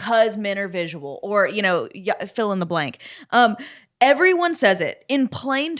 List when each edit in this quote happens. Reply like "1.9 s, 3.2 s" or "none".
none